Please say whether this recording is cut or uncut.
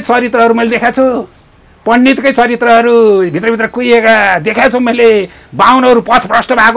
uncut